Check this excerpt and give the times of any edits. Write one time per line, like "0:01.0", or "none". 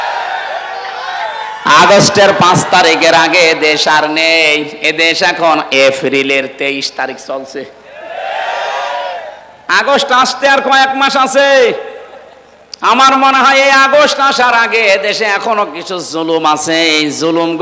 none

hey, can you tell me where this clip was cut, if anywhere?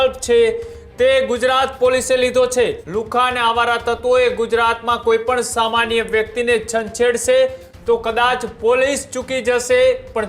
0:02.8

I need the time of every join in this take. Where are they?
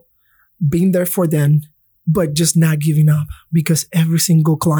none

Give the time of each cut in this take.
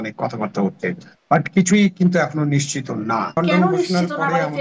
0:03.4

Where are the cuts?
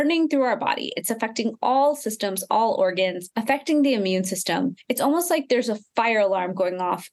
0:03.3
0:04.8

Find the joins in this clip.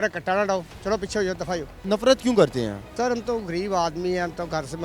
0:01.8
0:02.8

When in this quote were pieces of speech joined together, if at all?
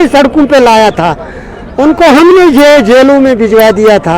none

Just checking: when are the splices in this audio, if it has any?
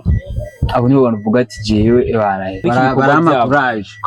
0:02.6

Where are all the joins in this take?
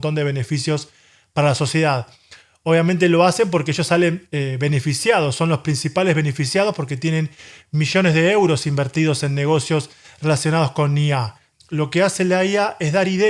0:11.5

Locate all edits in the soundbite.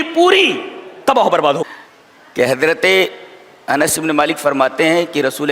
0:01.6

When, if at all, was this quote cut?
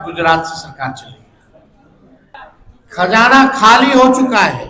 0:02.3

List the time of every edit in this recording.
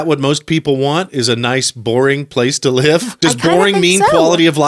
0:03.1

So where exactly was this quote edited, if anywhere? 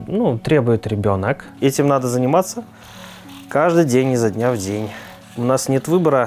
0:01.5

